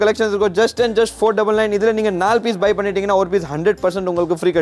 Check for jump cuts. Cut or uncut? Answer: uncut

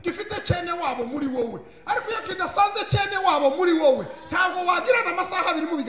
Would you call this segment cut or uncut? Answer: uncut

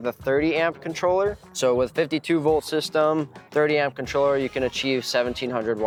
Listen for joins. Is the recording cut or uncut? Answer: uncut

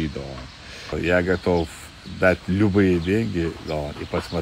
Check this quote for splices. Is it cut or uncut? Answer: cut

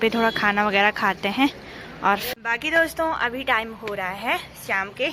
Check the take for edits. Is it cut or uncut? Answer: cut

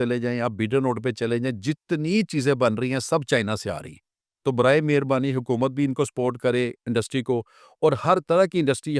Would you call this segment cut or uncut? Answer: uncut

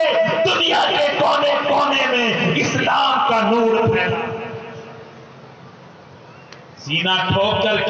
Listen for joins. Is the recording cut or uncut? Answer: uncut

